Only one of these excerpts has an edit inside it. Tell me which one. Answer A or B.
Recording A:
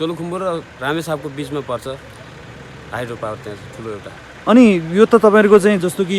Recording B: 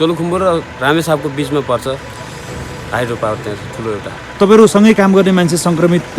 B